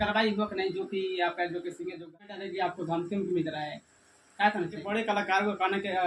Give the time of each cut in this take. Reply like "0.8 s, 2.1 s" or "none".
2.3 s, 4.8 s